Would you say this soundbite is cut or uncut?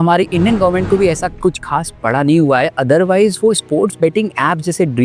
uncut